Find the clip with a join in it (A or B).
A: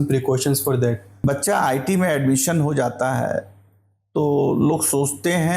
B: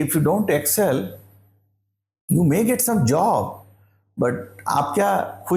A